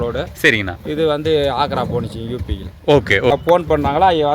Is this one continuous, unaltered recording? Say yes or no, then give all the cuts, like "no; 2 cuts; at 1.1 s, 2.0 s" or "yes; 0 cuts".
no; 1 cut; at 3.3 s